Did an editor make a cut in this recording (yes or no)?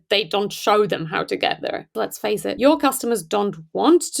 yes